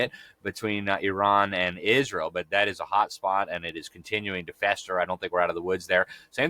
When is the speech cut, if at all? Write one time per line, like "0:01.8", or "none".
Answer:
none

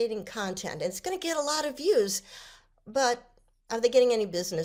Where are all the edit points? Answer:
none

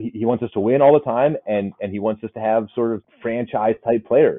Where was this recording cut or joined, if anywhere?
0:03.1

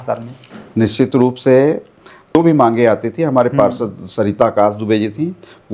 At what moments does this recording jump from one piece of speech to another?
0:02.3

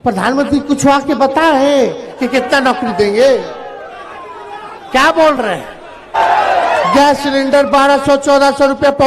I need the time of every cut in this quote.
0:06.1

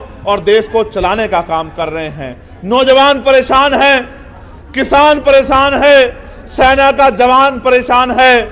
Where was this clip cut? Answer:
none

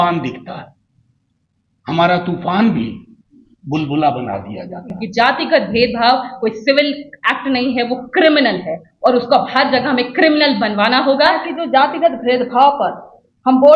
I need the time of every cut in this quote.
0:05.0
0:11.4

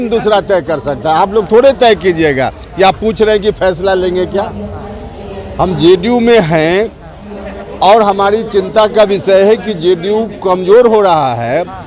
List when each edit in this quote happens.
none

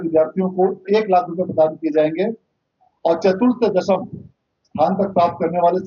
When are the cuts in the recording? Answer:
none

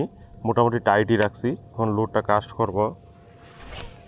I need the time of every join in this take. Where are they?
0:01.7

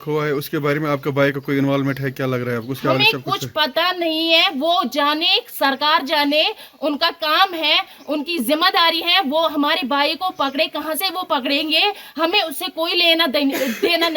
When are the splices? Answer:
none

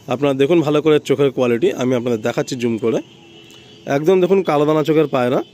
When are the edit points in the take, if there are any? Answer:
none

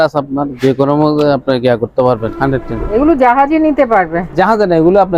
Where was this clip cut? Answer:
0:02.3

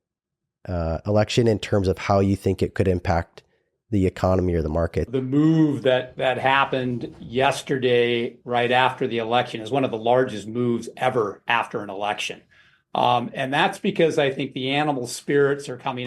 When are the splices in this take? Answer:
0:05.1

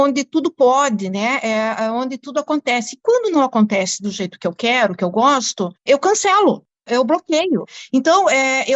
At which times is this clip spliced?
0:07.8

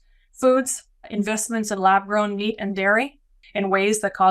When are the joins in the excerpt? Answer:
0:01.1
0:03.4

